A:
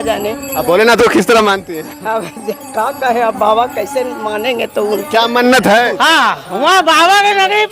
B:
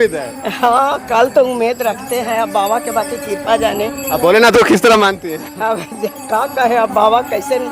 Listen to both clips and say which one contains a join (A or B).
A